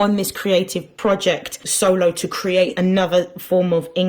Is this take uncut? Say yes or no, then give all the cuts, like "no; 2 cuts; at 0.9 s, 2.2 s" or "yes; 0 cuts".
no; 2 cuts; at 1.1 s, 2.7 s